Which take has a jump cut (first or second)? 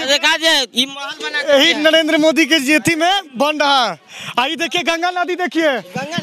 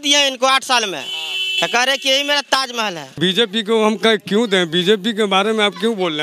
second